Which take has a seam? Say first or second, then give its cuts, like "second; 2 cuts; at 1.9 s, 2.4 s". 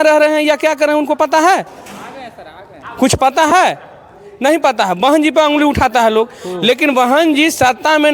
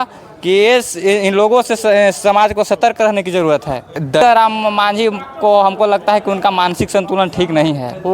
second; 1 cut; at 4.2 s